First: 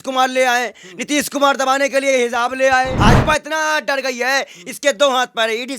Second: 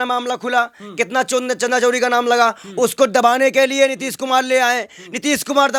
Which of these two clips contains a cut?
first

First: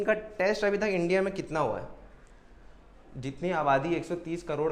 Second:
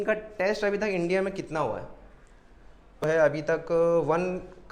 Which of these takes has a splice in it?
second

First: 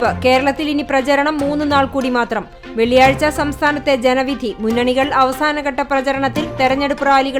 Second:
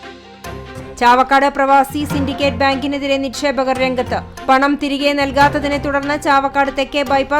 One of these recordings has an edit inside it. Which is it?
second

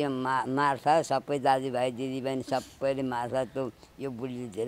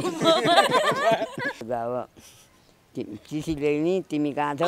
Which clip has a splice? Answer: second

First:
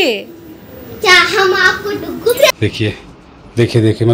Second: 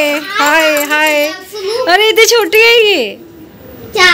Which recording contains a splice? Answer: first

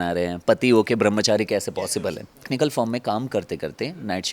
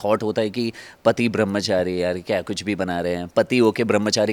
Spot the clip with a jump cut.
first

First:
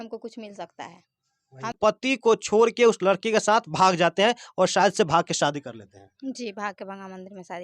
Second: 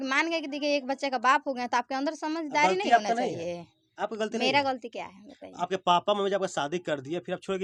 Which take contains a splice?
first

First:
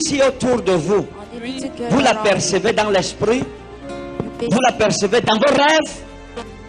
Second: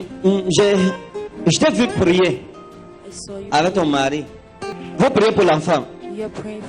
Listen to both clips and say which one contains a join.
second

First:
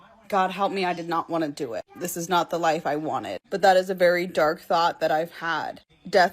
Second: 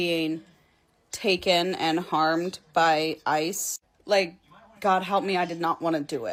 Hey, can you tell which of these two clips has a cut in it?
first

